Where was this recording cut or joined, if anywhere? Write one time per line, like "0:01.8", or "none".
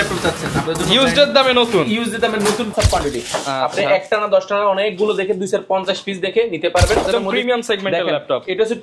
0:02.7
0:07.1